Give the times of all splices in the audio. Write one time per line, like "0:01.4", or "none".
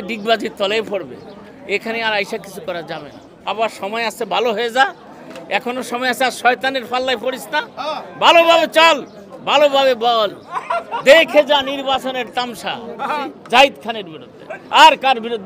0:03.5
0:13.3